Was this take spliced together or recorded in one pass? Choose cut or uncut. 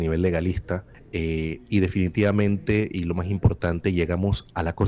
cut